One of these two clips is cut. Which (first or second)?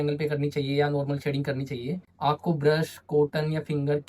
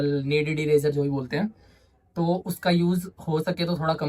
first